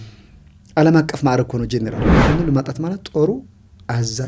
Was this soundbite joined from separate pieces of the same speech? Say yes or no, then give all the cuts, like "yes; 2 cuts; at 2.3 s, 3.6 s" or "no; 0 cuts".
yes; 1 cut; at 2.1 s